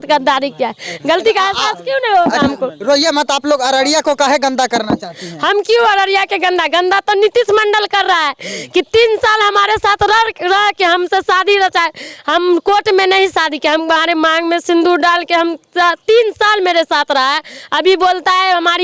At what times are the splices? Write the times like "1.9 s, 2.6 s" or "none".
none